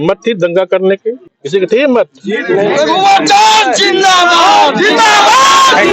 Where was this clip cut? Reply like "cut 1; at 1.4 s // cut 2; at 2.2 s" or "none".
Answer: cut 1; at 1.3 s